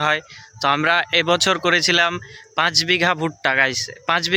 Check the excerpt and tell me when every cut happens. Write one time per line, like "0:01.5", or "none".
none